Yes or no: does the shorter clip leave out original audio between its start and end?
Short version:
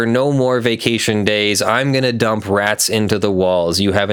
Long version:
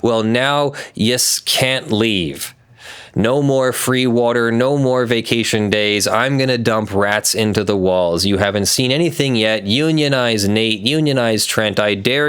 no